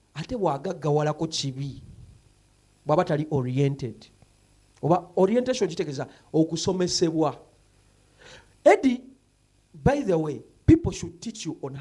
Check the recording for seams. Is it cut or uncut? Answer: uncut